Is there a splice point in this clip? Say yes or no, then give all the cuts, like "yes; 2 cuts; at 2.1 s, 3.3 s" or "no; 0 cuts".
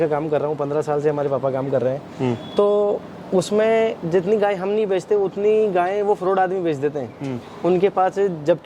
no; 0 cuts